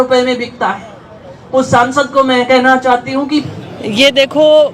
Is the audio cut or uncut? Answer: cut